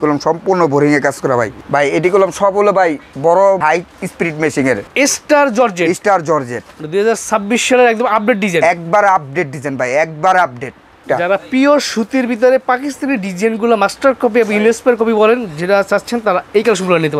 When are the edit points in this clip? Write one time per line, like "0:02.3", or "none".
0:01.6
0:03.6
0:04.9
0:11.0